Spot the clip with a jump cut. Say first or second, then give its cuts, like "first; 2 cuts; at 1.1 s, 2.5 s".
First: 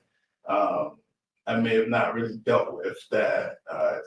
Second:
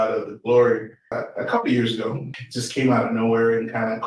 second; 2 cuts; at 1.1 s, 2.3 s